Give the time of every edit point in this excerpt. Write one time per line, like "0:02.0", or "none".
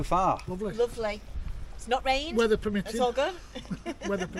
none